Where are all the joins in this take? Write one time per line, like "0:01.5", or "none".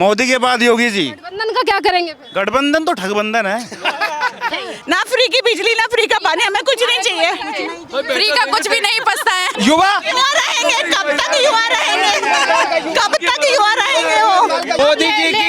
0:04.5
0:09.5
0:14.8